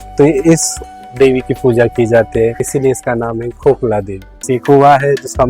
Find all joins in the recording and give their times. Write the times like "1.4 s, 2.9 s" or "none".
2.6 s, 4.4 s